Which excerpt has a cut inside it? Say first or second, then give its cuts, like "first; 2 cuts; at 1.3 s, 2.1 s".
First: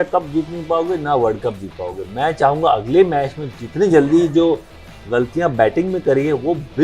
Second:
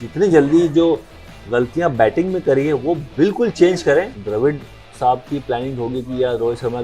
second; 1 cut; at 4.2 s